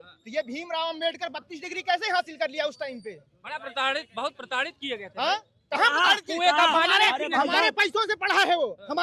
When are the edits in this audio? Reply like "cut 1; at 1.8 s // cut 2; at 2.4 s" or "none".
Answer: none

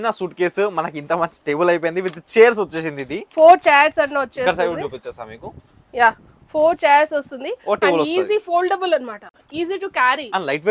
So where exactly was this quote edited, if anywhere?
none

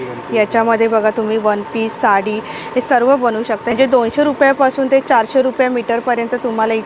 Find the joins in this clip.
cut 1; at 3.7 s

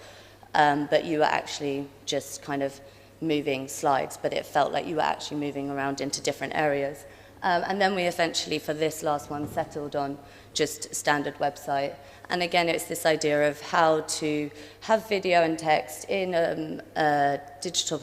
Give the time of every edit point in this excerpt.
cut 1; at 4.0 s

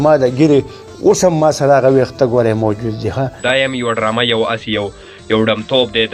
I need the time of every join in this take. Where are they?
cut 1; at 3.4 s

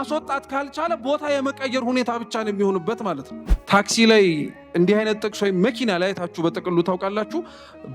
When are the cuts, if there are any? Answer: cut 1; at 3.3 s

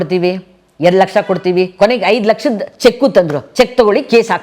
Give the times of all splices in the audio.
cut 1; at 3.4 s

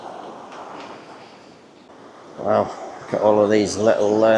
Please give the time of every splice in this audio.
cut 1; at 1.8 s

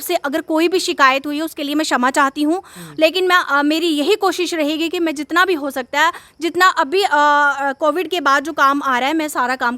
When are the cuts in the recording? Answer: none

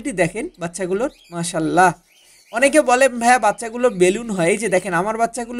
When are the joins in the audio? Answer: none

